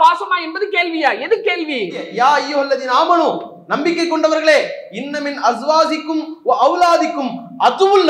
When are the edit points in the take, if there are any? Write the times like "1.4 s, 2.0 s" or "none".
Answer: 2.1 s